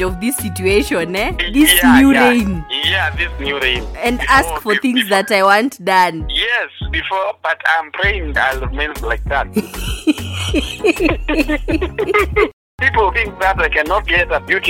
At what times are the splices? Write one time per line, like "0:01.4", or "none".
0:12.6